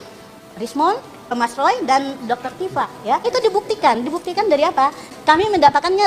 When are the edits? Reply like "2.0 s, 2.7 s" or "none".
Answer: 1.3 s, 3.2 s, 5.1 s